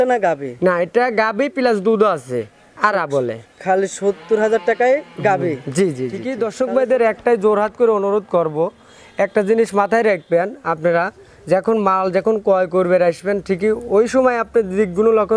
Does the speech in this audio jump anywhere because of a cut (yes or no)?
yes